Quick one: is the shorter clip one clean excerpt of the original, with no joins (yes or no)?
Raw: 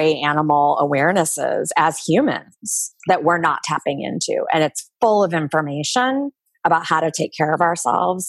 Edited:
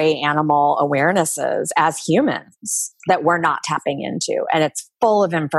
yes